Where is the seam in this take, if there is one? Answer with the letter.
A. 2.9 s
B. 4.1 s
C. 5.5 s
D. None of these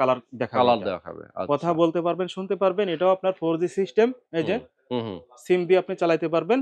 D